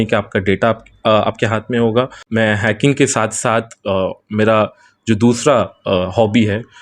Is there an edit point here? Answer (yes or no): yes